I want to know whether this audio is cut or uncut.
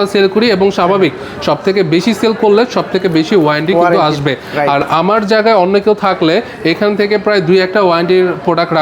uncut